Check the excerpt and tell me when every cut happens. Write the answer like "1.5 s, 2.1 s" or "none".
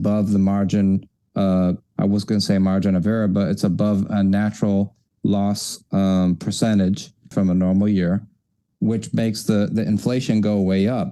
7.3 s